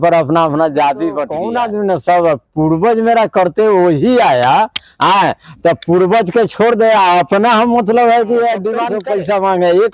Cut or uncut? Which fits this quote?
cut